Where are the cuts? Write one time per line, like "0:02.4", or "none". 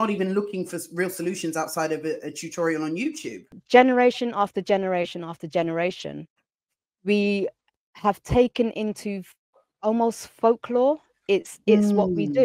0:03.6